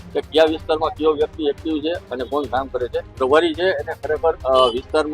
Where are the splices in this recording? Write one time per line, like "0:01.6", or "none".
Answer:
0:03.2